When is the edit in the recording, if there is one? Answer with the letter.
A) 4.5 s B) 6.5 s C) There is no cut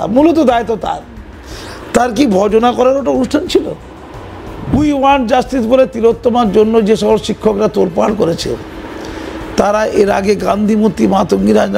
A